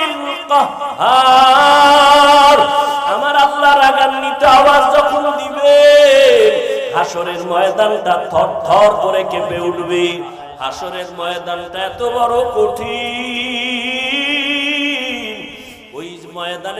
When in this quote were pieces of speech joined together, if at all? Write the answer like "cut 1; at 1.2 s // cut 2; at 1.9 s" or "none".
cut 1; at 10.4 s